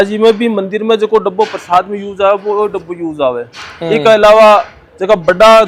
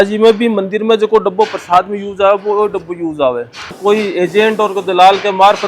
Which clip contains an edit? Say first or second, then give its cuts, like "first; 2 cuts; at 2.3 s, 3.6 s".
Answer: second; 1 cut; at 3.7 s